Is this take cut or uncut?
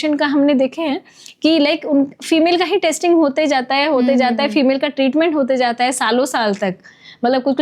uncut